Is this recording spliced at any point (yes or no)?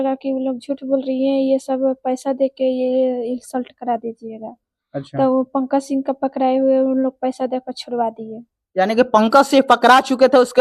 no